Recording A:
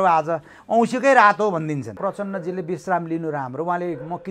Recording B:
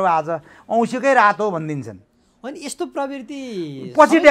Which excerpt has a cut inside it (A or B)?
A